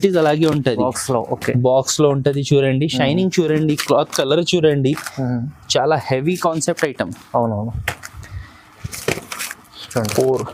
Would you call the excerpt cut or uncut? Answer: uncut